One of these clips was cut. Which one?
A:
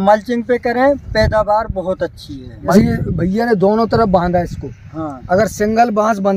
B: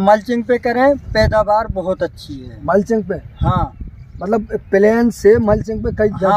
A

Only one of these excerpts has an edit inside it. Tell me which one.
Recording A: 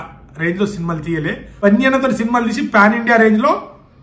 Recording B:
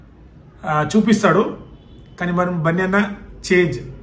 A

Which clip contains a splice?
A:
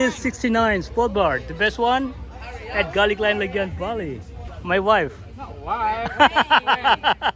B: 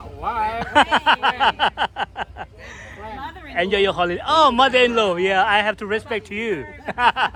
A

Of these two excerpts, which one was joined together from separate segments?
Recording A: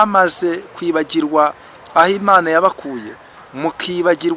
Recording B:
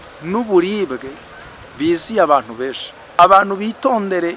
B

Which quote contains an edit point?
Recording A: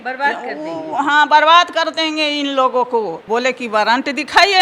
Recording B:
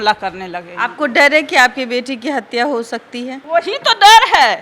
A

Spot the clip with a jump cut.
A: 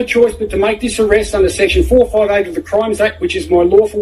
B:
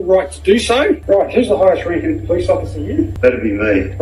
B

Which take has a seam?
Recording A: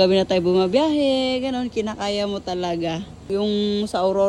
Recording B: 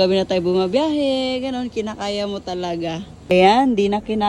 B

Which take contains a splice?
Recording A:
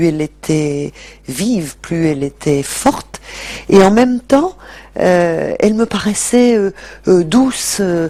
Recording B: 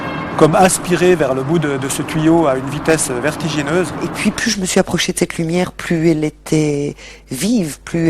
B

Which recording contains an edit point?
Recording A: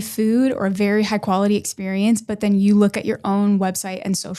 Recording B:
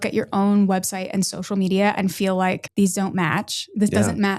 B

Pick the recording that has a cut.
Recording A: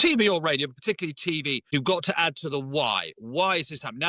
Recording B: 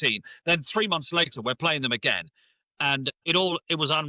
A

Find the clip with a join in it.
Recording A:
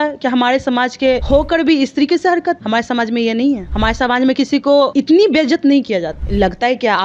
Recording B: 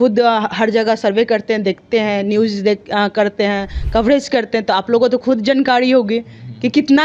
A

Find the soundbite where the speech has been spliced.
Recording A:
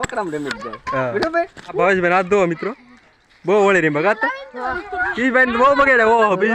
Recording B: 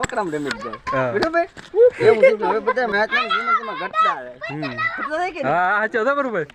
A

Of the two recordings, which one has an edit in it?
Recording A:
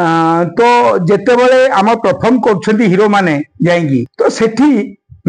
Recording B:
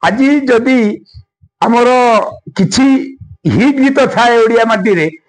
A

